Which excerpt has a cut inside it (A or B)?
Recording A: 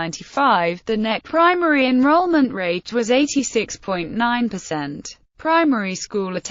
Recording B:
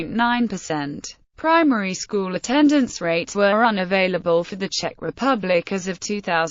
B